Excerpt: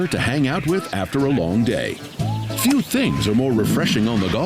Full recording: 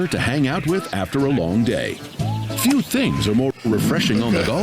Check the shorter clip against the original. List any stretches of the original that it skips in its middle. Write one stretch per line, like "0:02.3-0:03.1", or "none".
0:03.5-0:03.6